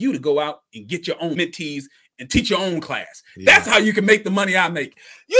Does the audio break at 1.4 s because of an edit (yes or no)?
yes